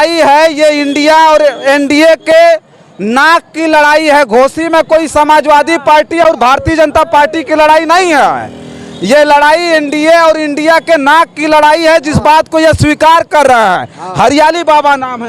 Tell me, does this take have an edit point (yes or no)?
no